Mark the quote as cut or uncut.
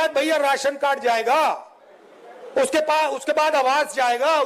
uncut